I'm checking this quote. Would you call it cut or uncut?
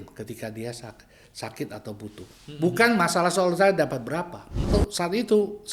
cut